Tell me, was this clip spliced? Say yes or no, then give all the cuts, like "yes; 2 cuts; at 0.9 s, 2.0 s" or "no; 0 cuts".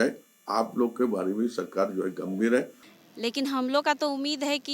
yes; 1 cut; at 2.8 s